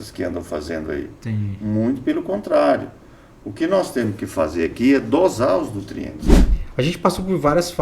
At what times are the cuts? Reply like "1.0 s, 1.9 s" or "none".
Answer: 6.3 s

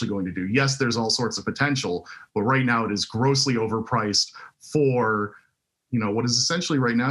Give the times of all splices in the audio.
none

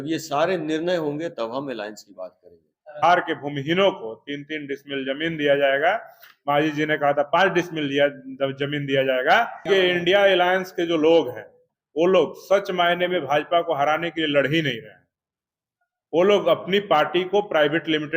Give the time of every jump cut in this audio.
3.0 s, 9.7 s, 11.6 s

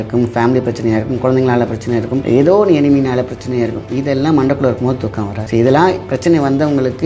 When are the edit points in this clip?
2.2 s, 5.3 s

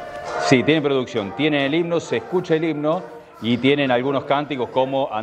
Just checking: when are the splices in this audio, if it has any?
none

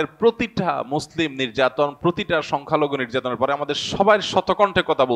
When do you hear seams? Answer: none

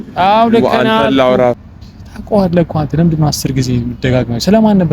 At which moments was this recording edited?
1.6 s

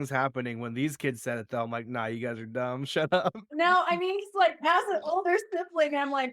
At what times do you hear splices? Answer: 3.4 s

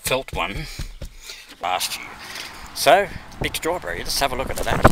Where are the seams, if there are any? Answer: 1.6 s

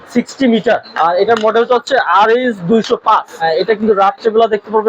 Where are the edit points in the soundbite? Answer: 0.9 s, 3.4 s

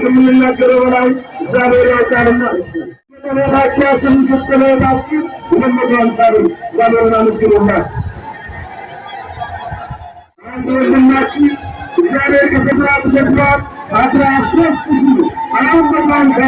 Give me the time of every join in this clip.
3.3 s

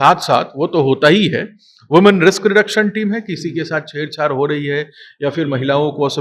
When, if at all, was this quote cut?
none

